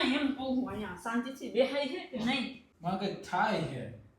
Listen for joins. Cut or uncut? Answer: cut